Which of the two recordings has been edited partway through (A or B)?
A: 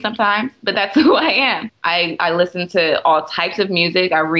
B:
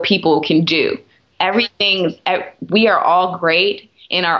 A